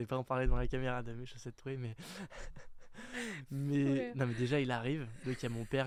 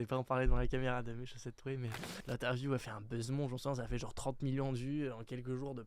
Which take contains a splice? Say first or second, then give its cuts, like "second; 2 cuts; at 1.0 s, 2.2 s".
second; 1 cut; at 2.1 s